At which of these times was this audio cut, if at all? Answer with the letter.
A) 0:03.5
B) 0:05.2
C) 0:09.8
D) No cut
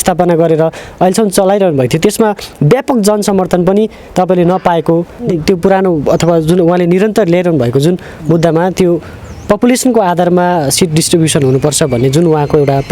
B